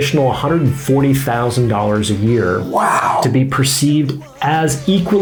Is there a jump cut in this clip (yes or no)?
no